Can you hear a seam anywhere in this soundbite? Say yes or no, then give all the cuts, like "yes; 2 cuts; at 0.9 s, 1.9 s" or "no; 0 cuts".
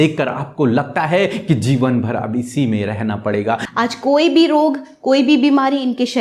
yes; 1 cut; at 3.7 s